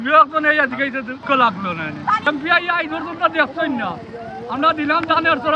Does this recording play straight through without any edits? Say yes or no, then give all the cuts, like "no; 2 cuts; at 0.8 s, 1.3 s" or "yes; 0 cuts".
no; 2 cuts; at 1.2 s, 2.3 s